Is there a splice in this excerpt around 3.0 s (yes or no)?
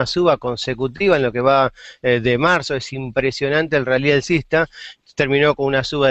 yes